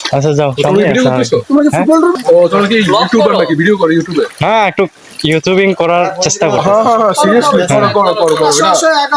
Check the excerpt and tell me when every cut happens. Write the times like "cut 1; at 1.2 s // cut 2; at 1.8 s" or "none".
cut 1; at 2.1 s

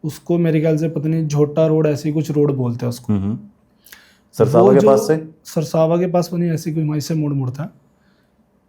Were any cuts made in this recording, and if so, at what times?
none

